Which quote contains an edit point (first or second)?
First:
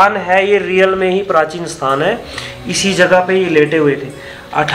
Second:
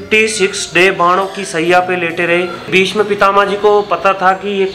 second